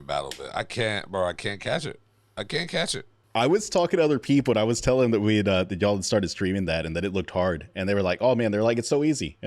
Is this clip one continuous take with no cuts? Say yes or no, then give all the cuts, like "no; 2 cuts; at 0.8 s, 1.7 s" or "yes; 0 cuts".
no; 1 cut; at 3.2 s